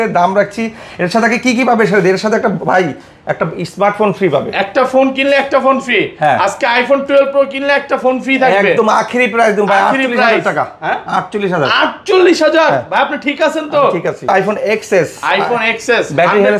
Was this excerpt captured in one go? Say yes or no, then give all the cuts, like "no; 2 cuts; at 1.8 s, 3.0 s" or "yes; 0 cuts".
no; 1 cut; at 14.3 s